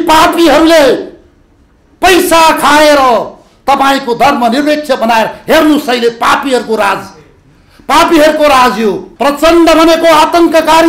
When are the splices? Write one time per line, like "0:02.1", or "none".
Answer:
0:09.1